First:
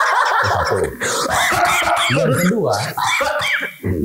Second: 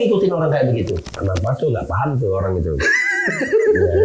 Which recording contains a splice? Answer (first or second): second